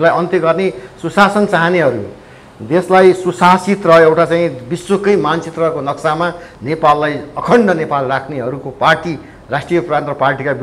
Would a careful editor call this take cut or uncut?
uncut